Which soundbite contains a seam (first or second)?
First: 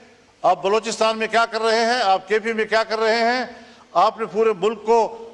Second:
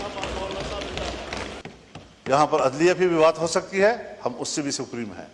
second